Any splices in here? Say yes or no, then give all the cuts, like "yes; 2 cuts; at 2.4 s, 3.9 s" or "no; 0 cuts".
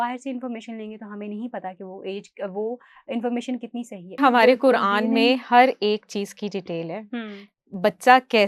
yes; 1 cut; at 4.2 s